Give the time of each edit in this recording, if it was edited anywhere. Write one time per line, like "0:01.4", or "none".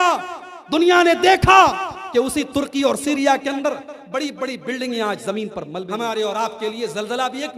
0:05.7